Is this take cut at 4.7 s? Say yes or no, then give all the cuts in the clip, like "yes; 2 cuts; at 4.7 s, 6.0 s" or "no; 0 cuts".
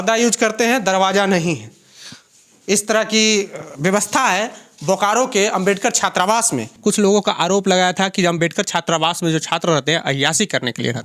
no; 1 cut; at 6.6 s